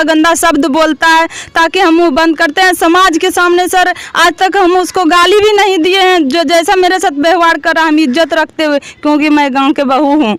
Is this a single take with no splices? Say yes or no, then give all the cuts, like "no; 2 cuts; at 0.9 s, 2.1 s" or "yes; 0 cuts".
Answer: yes; 0 cuts